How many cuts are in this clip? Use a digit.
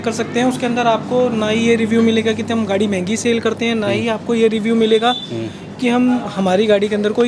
0